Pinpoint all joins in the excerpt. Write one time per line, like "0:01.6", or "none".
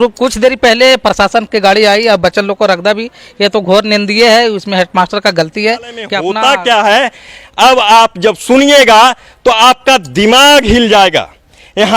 0:06.2